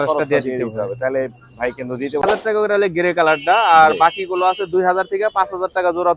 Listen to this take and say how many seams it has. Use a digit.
1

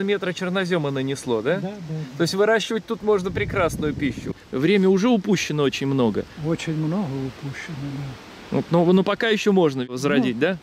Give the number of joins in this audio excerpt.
2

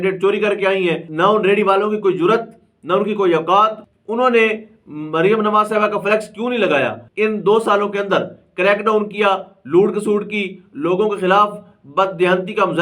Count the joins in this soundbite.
3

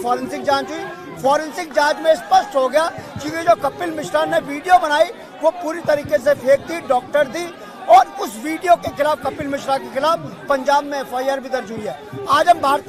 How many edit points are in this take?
0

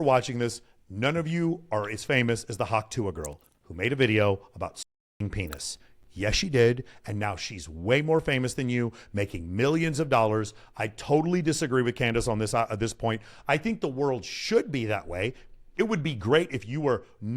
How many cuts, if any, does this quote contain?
0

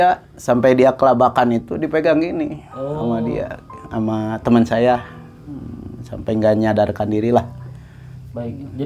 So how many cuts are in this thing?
0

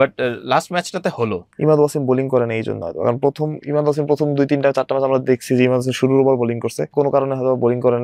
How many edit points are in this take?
2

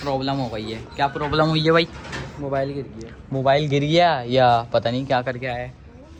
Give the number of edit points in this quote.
0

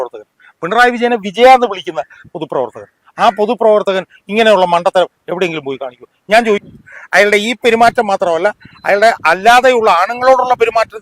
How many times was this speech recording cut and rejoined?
1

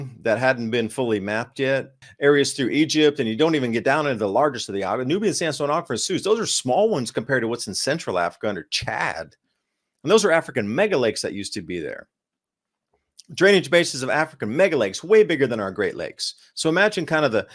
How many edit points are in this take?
1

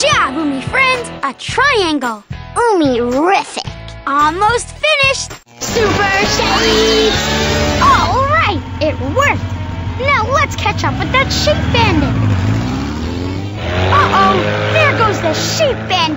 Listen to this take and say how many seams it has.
1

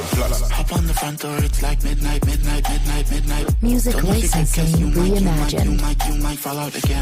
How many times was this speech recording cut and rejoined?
0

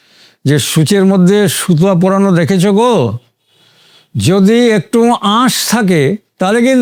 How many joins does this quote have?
0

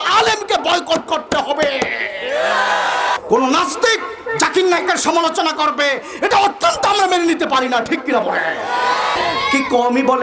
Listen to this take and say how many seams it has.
2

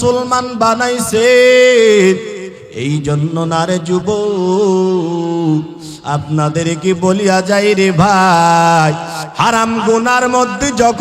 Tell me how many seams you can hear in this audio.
1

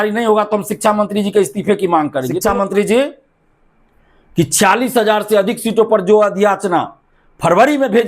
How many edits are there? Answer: 1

